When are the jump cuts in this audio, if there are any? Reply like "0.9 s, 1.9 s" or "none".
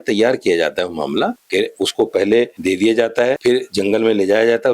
1.4 s, 2.5 s, 3.4 s